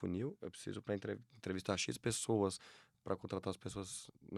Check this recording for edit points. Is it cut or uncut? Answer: uncut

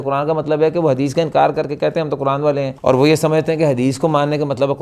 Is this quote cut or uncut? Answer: cut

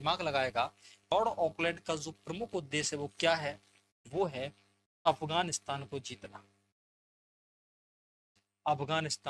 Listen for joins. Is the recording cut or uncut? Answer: cut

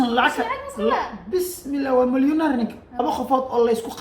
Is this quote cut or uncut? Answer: cut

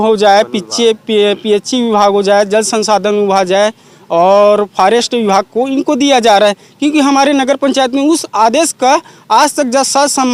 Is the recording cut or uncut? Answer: uncut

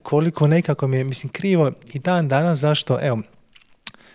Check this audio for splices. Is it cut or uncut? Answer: uncut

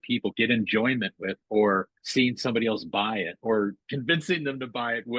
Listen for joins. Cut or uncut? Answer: uncut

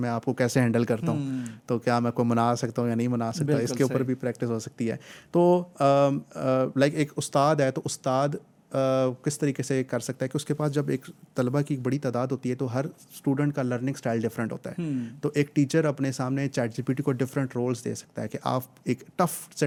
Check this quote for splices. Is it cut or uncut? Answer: uncut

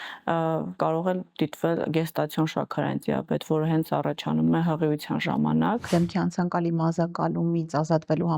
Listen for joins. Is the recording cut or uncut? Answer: cut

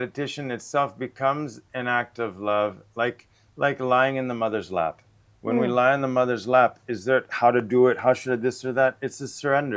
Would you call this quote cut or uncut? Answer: uncut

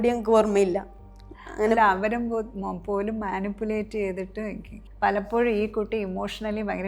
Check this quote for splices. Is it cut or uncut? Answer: uncut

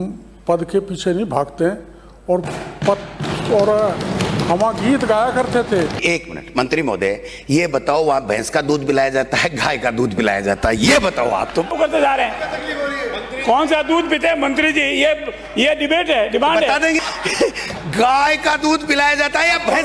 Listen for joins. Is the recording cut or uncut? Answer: cut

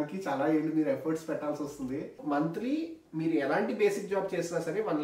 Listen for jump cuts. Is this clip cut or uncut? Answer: cut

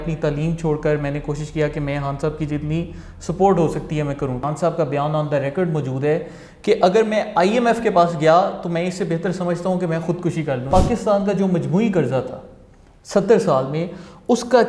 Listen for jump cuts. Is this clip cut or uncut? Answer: cut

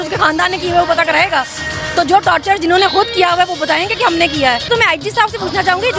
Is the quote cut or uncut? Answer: cut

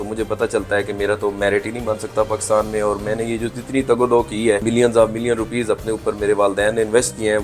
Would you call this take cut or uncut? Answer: cut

